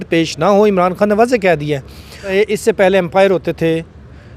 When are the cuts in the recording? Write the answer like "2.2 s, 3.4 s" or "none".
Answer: 2.3 s